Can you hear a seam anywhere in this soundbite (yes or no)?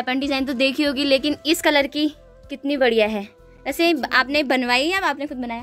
no